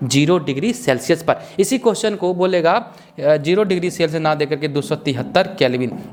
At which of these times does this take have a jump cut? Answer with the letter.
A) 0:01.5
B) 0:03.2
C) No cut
C